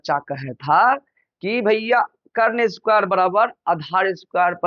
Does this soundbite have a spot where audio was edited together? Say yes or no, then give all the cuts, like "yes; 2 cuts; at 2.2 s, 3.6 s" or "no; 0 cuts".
no; 0 cuts